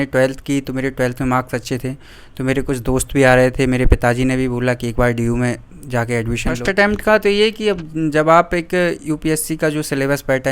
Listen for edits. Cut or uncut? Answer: cut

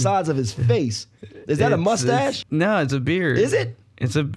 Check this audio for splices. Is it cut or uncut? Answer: cut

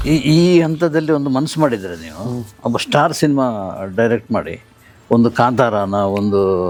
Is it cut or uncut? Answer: uncut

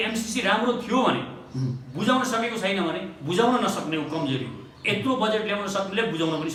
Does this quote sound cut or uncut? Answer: uncut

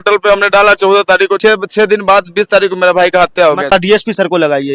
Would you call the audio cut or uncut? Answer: cut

